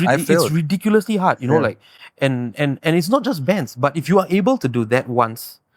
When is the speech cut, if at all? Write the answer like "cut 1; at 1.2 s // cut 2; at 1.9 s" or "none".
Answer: none

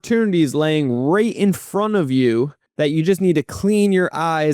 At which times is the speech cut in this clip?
cut 1; at 2.6 s

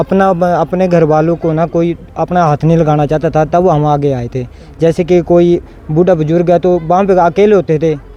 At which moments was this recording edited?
none

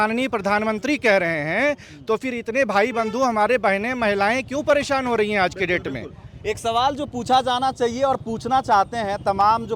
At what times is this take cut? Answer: none

